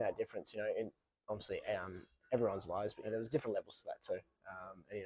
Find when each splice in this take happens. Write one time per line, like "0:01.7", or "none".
0:03.1

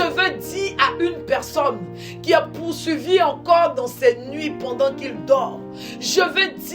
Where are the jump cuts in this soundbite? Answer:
none

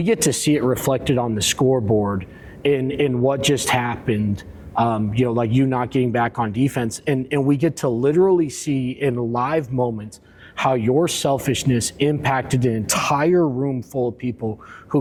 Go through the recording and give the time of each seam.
none

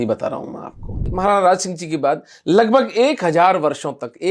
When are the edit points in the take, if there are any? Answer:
0:01.0

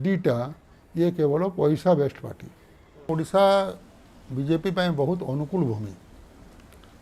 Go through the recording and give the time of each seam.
0:03.1

